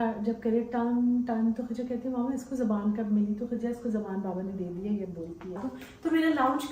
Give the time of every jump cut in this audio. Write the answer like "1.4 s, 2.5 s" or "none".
5.6 s